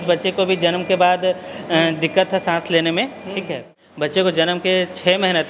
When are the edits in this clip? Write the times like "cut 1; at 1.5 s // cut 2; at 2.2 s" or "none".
cut 1; at 3.8 s